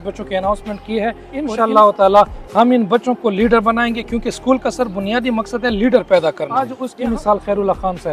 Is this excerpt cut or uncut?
cut